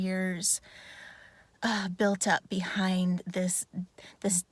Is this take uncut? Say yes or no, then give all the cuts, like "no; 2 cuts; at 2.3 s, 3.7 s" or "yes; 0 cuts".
yes; 0 cuts